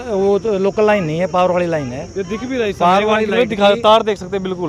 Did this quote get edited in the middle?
no; 0 cuts

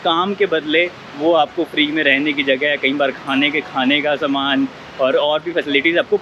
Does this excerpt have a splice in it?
no; 0 cuts

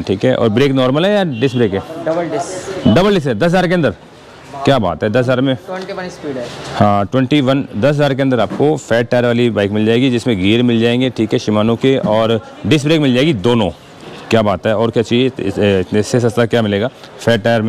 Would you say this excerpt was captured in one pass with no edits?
yes; 0 cuts

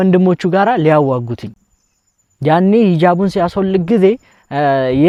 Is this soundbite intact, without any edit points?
yes; 0 cuts

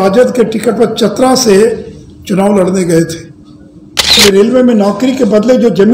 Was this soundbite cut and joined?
yes; 1 cut; at 4.2 s

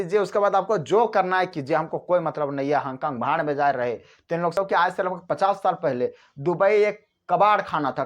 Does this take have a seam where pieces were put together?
yes; 1 cut; at 4.5 s

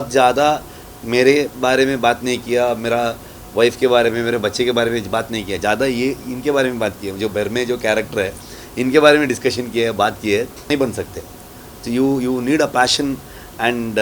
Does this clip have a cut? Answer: yes; 1 cut; at 10.7 s

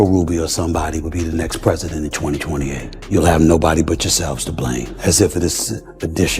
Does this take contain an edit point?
yes; 2 cuts; at 2.9 s, 4.9 s

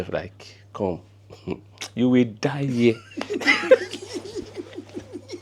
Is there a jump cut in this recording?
no; 0 cuts

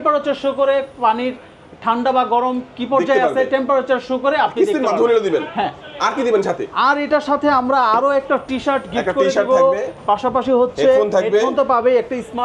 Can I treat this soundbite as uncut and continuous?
yes; 0 cuts

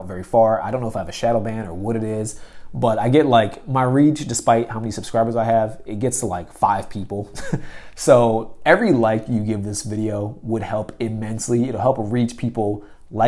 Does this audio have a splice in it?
no; 0 cuts

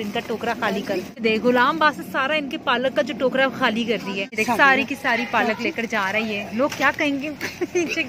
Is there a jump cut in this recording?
yes; 2 cuts; at 1.2 s, 4.4 s

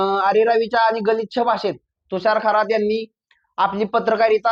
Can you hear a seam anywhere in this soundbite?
no; 0 cuts

